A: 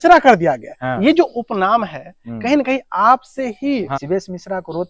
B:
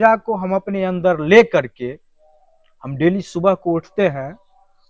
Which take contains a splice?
A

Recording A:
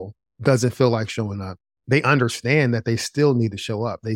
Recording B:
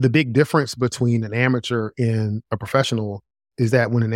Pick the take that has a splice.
A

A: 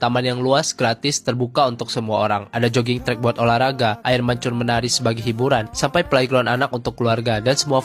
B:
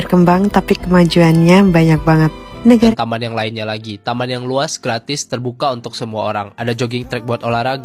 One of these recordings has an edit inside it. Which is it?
B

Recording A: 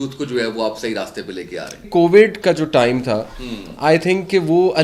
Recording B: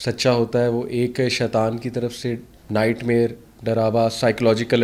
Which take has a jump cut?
A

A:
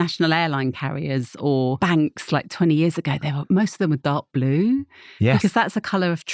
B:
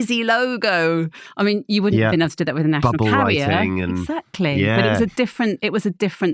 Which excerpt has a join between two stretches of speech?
A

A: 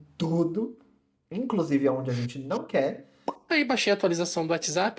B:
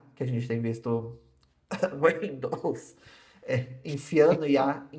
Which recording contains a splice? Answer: A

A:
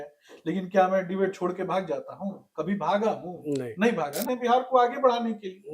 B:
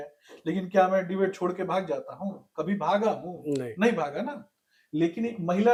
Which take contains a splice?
A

